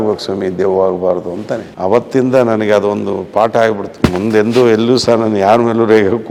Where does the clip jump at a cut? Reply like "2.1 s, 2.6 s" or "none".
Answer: none